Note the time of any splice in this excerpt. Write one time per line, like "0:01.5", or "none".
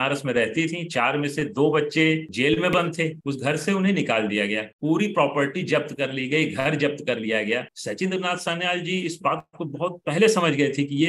0:03.2
0:07.7